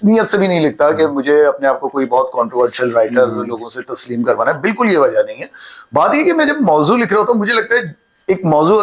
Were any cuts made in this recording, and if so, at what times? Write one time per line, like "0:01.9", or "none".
none